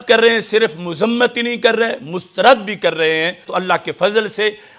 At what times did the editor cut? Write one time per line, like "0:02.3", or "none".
0:03.5